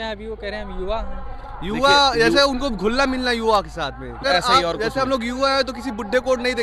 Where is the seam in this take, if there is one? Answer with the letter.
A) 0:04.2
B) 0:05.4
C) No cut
A